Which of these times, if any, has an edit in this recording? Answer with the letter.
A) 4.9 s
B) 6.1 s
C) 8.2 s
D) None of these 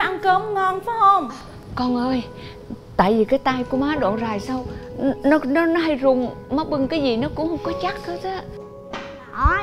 C